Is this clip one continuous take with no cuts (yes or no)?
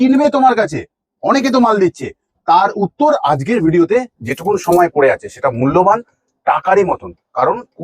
no